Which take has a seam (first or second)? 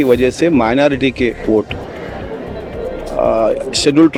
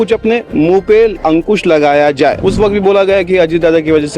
second